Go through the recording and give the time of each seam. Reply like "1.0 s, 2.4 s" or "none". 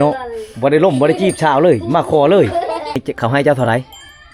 3.0 s